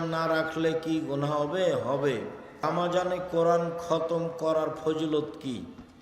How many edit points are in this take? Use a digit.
1